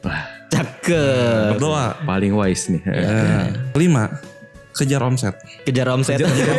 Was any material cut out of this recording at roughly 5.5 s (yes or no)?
yes